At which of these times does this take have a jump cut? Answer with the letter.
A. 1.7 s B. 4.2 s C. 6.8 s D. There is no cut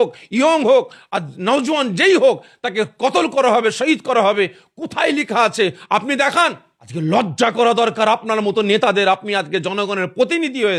D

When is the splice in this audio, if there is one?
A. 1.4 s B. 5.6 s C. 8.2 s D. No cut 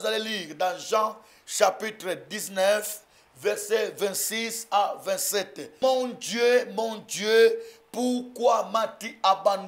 B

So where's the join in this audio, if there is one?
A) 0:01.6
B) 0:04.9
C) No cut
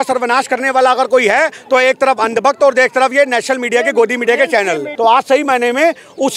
B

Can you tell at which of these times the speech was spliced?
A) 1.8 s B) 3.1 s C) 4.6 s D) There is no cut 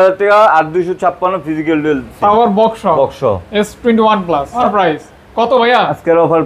C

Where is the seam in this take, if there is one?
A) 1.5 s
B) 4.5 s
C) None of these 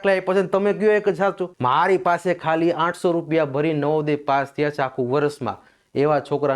A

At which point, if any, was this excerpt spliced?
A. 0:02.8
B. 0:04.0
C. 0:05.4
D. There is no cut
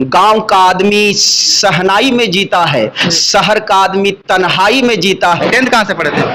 C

